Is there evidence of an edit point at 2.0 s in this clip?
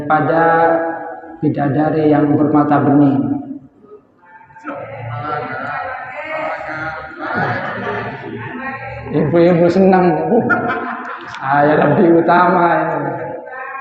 no; 0 cuts

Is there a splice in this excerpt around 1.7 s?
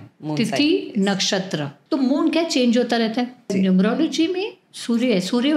yes; 2 cuts; at 1.7 s, 3.5 s

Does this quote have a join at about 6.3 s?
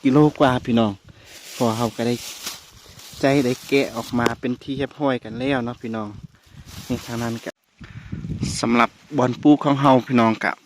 no; 1 cut; at 7.5 s

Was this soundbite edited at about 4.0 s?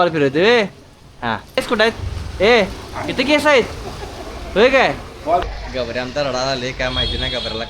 no; 2 cuts; at 1.6 s, 5.4 s

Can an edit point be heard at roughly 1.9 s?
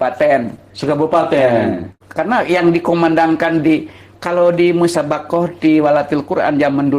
yes; 1 cut; at 1.9 s

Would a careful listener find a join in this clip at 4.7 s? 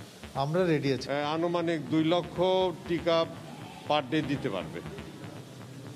no; 1 cut; at 1.0 s

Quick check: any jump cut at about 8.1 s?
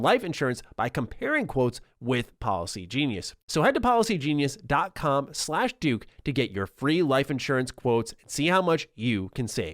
no; 1 cut; at 3.3 s

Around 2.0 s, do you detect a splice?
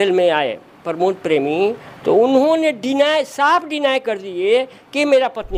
no; 0 cuts

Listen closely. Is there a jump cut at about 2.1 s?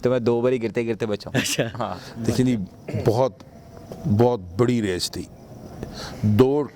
yes; 1 cut; at 2.1 s

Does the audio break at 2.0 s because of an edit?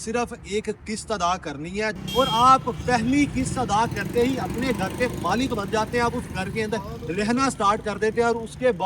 yes; 1 cut; at 2.0 s

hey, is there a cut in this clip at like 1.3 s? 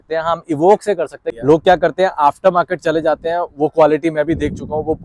yes; 1 cut; at 1.3 s

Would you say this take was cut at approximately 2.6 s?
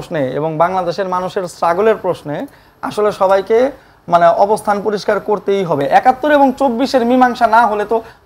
no; 1 cut; at 5.8 s

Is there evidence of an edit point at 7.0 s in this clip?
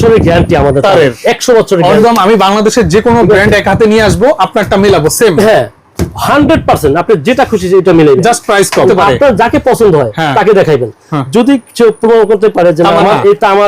no; 2 cuts; at 2.0 s, 8.9 s

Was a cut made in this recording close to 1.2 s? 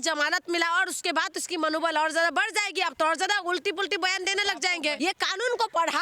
no; 1 cut; at 5.0 s

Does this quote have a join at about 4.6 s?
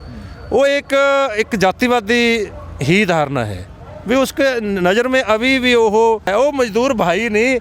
no; 1 cut; at 6.3 s

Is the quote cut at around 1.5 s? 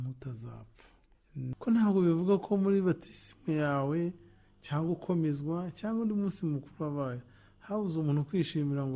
yes; 1 cut; at 1.5 s

